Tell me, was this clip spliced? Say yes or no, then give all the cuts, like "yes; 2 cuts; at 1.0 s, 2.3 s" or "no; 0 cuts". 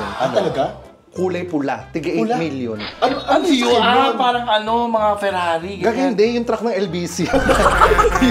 no; 0 cuts